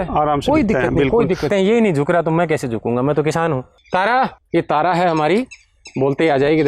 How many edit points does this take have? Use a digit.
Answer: 3